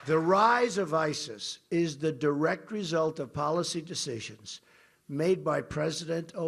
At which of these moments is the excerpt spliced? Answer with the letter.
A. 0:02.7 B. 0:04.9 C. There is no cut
C